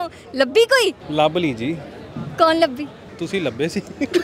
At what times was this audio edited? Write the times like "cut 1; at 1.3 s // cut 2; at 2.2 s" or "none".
cut 1; at 1.0 s // cut 2; at 3.0 s